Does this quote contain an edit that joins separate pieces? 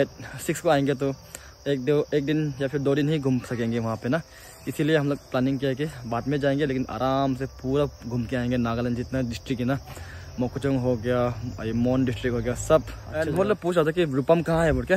yes; 1 cut; at 13.0 s

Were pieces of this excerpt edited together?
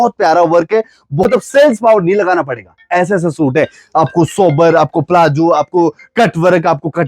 yes; 1 cut; at 1.2 s

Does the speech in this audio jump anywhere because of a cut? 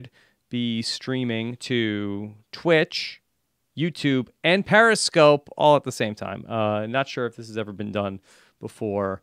no; 0 cuts

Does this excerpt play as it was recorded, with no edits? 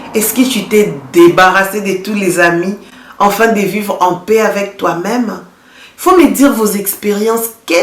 yes; 0 cuts

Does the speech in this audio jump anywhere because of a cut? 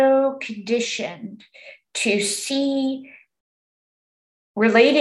no; 0 cuts

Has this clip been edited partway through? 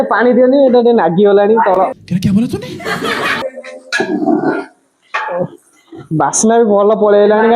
no; 0 cuts

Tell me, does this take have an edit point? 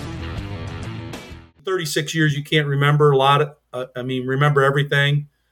yes; 1 cut; at 1.0 s

